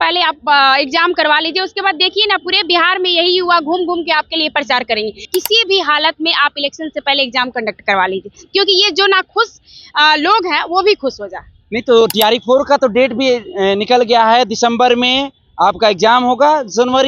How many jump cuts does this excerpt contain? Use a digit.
1